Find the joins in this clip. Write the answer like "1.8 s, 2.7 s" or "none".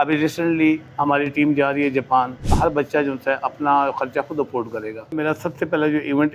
0.9 s, 2.5 s, 5.2 s